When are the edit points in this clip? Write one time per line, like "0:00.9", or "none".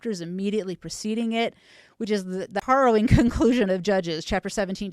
0:02.6